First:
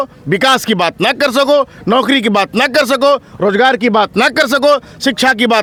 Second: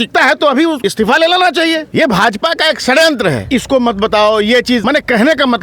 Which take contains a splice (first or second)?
second